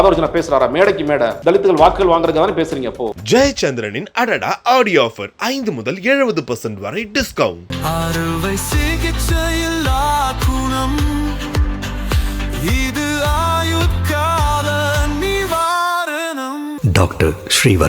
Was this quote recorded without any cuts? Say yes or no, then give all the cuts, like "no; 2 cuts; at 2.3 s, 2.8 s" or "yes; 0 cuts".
no; 2 cuts; at 1.4 s, 3.1 s